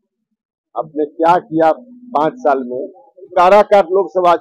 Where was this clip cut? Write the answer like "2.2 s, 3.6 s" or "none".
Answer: 3.3 s